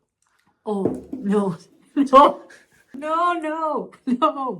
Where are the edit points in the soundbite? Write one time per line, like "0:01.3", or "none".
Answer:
0:03.0

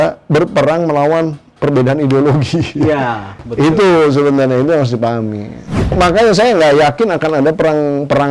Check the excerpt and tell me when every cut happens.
0:05.8

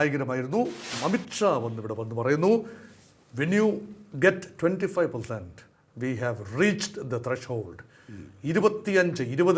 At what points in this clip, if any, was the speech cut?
0:00.9

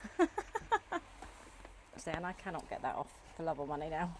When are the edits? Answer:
0:02.0

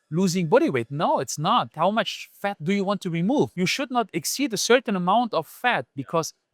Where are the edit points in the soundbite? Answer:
0:01.7
0:03.5

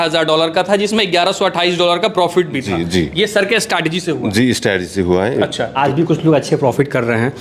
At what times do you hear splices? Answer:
0:05.7

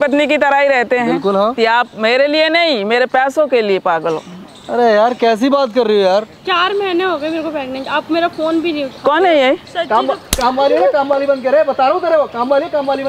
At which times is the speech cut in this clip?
0:01.6
0:06.4
0:09.7

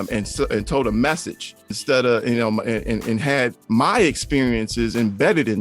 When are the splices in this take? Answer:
0:01.8
0:03.6

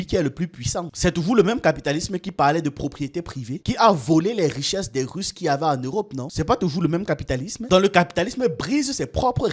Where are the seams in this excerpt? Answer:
none

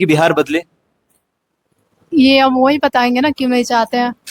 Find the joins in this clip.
none

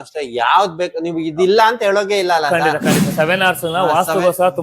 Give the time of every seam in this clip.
0:03.1

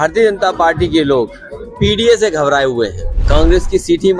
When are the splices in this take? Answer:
0:03.2

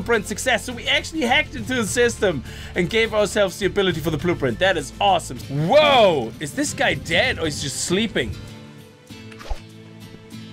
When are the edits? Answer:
0:05.3

